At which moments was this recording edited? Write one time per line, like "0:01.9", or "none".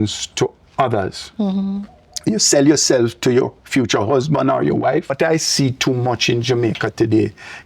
0:05.1